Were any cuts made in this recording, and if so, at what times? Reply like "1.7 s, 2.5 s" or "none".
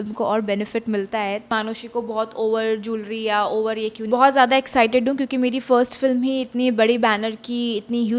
1.5 s, 4.0 s